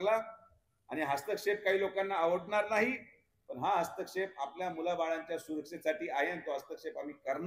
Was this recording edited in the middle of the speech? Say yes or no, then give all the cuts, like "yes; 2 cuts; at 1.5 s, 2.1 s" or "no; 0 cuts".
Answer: no; 0 cuts